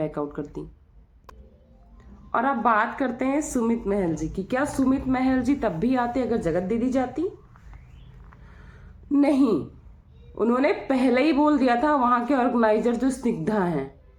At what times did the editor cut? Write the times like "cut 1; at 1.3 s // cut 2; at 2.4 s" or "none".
none